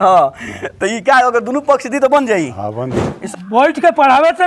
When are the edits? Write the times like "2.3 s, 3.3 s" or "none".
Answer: 3.2 s